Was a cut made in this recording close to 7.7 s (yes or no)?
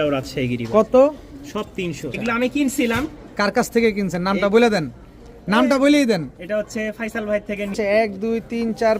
yes